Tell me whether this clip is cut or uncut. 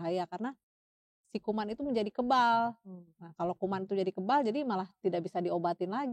uncut